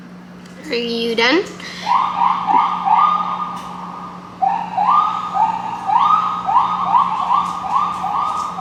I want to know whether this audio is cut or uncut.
uncut